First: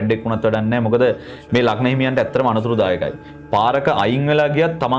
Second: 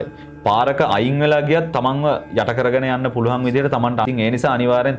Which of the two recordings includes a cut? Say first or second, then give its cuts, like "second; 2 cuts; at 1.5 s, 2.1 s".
second; 1 cut; at 4.0 s